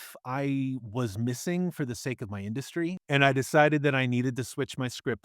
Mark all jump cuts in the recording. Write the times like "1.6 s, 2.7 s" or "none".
3.0 s